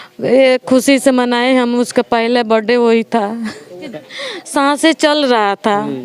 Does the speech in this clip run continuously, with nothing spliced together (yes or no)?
no